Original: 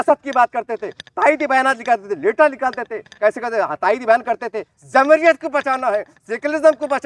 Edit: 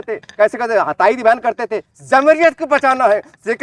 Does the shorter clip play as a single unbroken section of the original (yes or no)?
yes